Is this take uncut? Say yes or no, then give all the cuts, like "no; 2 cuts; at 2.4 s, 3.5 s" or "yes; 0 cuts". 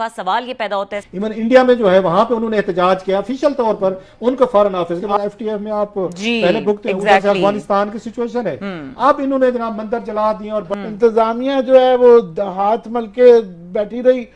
no; 3 cuts; at 1.0 s, 5.1 s, 10.7 s